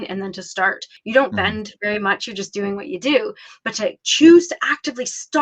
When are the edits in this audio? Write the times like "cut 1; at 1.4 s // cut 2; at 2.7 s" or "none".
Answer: cut 1; at 0.9 s